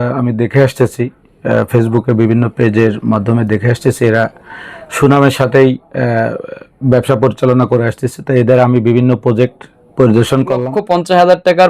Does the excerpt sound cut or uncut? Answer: cut